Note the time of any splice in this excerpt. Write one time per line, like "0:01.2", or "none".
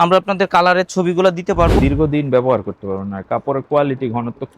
0:01.7